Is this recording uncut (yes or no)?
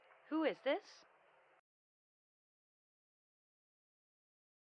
yes